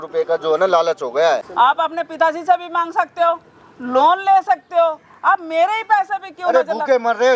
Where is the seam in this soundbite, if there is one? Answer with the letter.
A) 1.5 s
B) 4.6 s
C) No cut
A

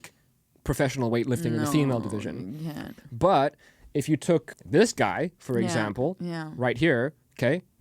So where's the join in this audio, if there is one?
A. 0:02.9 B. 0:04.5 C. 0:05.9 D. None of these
B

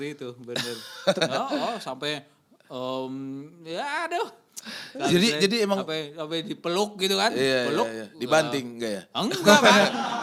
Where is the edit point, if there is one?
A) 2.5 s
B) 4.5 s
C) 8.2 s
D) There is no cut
D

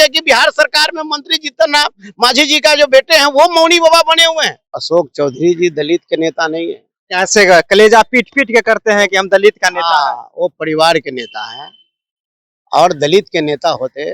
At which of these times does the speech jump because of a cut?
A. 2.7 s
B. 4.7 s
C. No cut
B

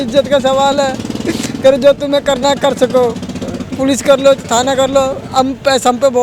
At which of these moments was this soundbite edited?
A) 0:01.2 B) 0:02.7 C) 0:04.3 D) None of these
D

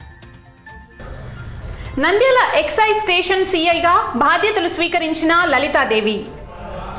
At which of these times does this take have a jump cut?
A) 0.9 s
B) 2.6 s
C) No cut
C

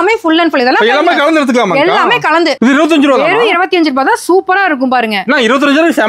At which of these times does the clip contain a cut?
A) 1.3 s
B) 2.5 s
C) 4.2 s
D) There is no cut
B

